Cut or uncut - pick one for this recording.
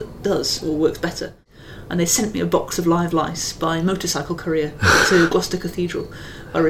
cut